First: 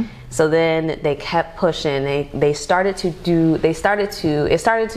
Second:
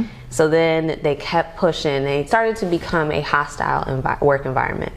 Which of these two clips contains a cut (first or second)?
second